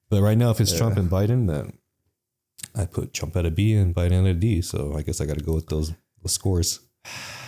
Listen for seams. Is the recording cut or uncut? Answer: uncut